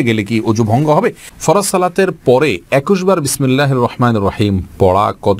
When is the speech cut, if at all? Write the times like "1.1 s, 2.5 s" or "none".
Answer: 1.3 s